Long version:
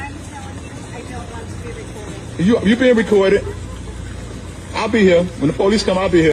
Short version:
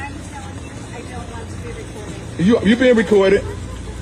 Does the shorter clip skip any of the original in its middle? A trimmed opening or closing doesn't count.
no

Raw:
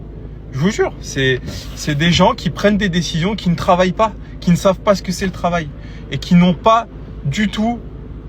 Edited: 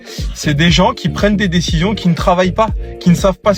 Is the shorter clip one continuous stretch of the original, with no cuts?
yes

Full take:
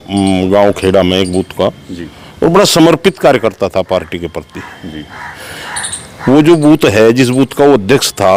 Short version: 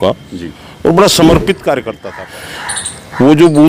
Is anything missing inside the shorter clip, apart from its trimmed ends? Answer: yes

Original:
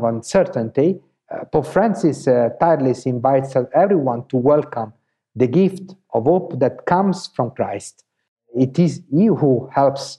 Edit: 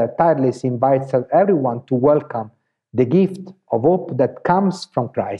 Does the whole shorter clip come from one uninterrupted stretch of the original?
yes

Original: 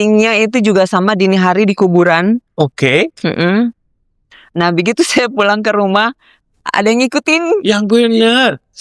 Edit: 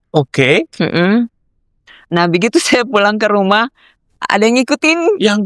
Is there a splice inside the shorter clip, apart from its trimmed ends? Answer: no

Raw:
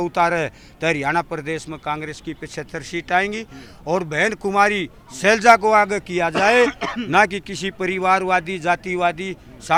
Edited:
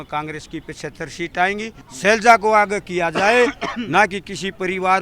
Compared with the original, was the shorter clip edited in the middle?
yes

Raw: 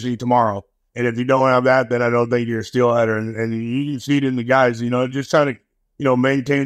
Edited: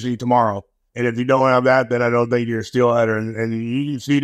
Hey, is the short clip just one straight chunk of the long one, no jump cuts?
yes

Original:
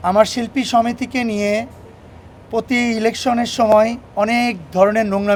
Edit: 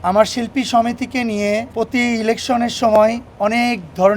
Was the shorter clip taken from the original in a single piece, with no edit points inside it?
no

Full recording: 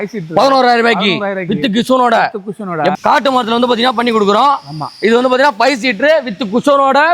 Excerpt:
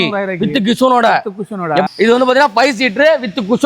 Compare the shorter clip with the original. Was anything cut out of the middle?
yes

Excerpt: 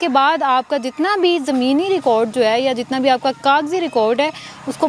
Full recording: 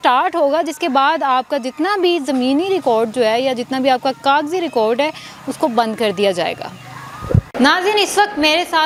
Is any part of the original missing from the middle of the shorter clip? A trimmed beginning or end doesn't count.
no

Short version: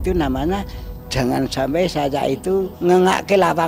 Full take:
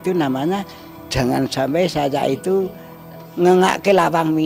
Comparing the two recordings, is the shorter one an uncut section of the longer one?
no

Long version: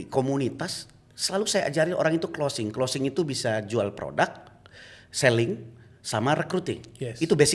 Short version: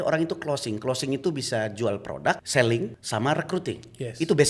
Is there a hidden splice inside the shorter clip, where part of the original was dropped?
yes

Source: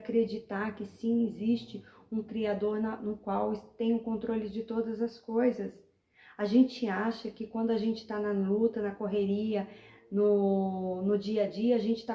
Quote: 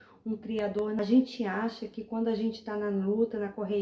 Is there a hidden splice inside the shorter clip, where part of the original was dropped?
yes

